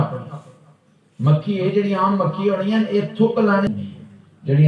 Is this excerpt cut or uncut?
cut